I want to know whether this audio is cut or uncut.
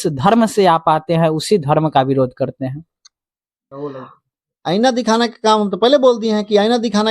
cut